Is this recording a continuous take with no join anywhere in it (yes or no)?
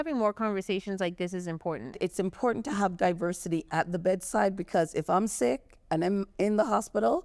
no